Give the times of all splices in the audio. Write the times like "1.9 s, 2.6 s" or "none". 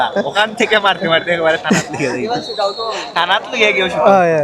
none

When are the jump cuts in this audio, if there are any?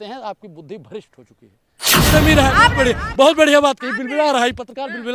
2.1 s

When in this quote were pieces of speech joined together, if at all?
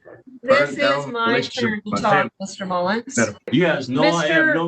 3.5 s

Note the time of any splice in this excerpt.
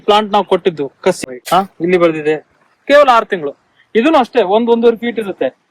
1.2 s

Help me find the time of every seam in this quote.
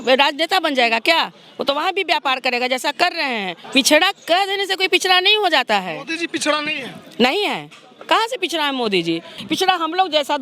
3.6 s, 9.4 s

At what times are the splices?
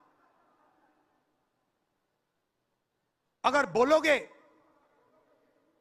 none

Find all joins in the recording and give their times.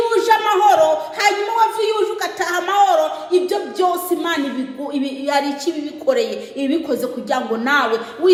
none

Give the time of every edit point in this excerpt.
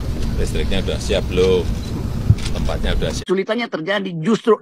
3.2 s

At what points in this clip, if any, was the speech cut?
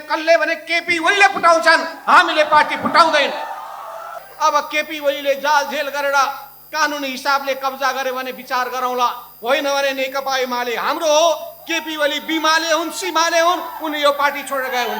4.2 s

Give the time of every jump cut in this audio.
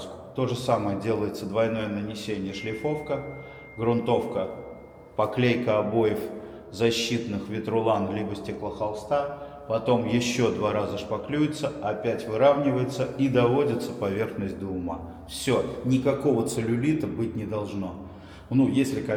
none

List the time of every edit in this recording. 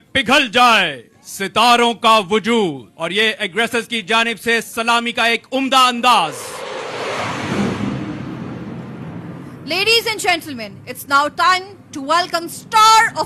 none

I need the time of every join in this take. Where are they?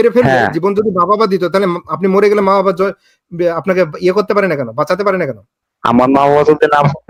none

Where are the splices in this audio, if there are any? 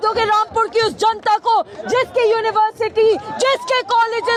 none

